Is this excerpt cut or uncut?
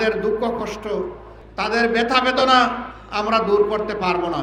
uncut